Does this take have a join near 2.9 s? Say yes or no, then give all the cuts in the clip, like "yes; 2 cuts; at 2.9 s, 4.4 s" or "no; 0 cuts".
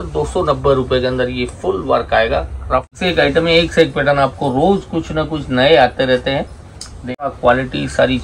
yes; 2 cuts; at 2.9 s, 7.3 s